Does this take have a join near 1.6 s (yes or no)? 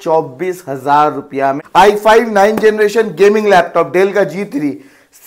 yes